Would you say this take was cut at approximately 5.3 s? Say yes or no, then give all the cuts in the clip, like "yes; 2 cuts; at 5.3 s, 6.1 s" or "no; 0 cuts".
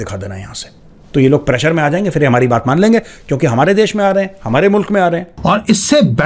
yes; 1 cut; at 5.3 s